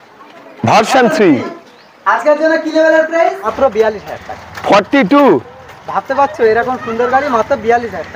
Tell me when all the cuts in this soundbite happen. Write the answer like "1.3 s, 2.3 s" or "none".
3.5 s